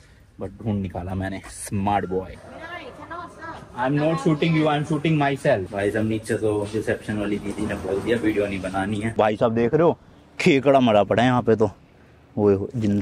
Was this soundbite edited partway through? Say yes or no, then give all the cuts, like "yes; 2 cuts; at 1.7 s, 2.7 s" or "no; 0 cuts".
yes; 3 cuts; at 2.3 s, 5.7 s, 9.1 s